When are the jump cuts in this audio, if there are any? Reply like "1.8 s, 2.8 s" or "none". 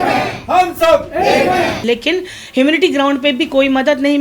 1.7 s